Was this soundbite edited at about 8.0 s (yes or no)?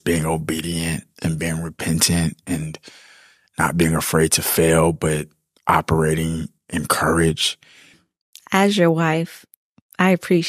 yes